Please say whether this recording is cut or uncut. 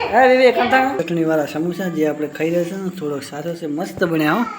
cut